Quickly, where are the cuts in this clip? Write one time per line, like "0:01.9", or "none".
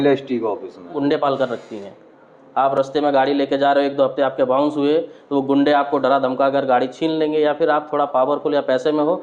0:00.9

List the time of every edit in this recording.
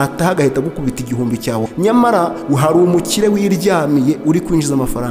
0:01.7
0:02.4

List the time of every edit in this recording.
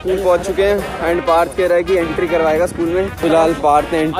0:03.2

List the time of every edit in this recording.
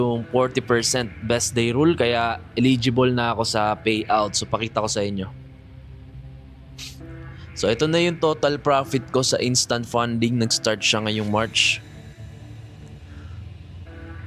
none

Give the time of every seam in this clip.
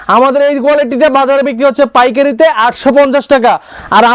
none

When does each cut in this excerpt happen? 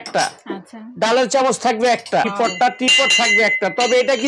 0:02.3

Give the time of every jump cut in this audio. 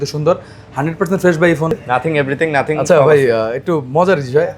0:01.7

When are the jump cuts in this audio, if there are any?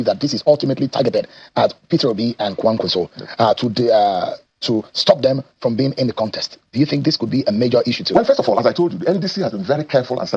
none

